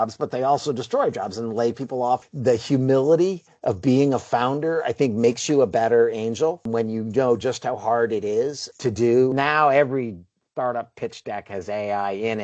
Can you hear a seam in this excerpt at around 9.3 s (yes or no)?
yes